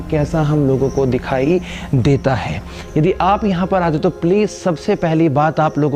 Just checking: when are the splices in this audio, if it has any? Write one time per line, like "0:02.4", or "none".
none